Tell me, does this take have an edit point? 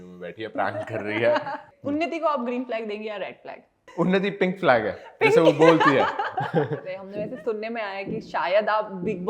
yes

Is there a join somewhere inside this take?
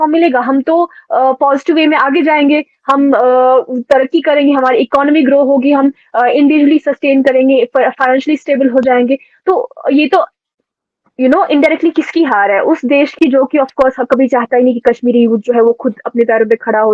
no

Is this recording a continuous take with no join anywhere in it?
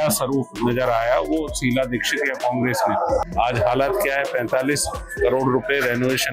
no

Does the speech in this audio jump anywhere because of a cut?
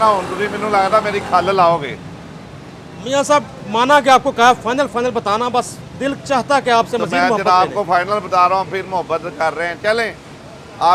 no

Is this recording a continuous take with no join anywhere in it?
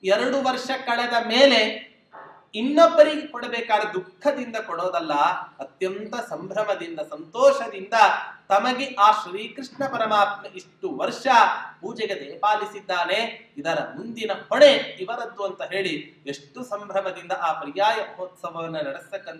yes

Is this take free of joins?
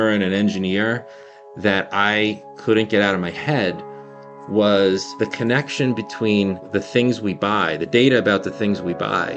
no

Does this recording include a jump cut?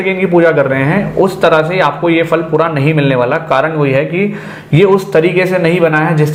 no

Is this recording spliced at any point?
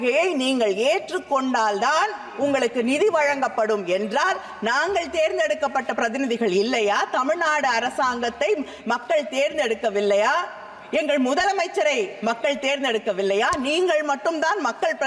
no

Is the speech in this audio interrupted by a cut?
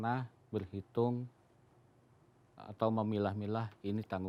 no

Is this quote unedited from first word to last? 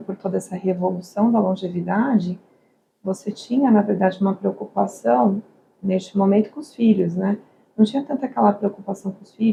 yes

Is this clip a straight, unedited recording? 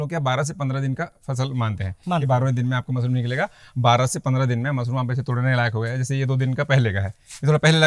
yes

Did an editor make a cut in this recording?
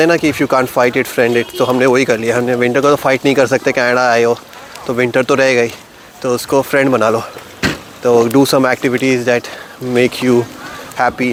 no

